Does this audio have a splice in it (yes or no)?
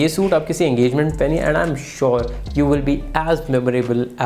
no